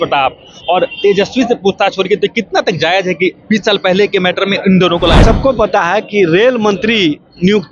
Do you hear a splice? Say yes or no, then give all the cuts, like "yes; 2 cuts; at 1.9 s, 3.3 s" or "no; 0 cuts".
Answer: yes; 1 cut; at 5.2 s